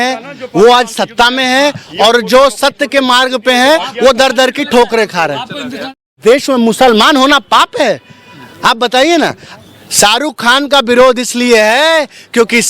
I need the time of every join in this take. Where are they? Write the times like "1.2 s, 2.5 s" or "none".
6.1 s